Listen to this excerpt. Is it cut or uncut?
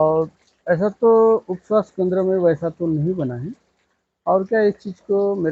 uncut